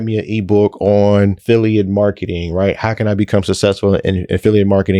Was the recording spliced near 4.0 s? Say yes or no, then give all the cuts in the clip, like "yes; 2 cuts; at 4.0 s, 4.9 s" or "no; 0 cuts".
no; 1 cut; at 1.4 s